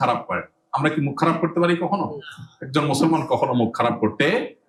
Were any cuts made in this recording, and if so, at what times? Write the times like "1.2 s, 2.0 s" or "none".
none